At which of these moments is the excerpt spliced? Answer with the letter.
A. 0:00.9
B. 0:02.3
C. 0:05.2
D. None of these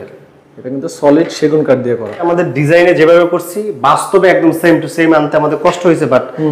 B